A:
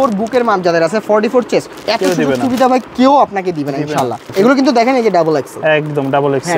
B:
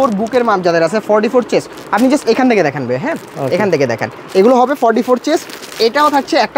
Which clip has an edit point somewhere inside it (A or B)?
A